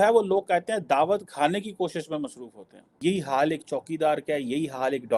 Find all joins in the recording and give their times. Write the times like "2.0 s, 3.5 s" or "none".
2.9 s